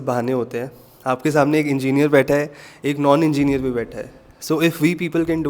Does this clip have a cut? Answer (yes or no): no